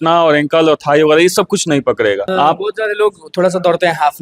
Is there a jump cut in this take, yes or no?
yes